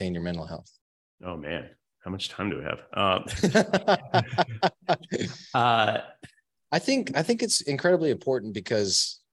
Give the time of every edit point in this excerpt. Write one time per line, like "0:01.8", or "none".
none